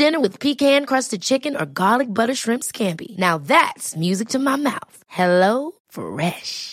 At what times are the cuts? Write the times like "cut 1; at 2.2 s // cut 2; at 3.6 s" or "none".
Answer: none